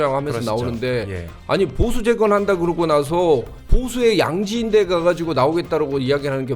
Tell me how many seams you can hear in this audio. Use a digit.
1